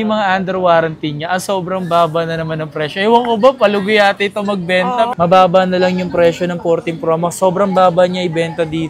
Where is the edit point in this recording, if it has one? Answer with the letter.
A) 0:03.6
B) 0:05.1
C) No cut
B